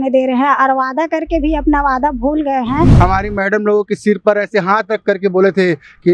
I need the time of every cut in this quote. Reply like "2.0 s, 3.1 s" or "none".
2.9 s